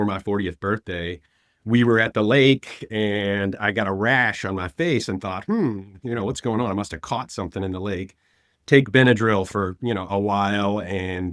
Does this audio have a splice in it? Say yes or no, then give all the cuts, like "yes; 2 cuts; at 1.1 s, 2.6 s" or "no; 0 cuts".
no; 0 cuts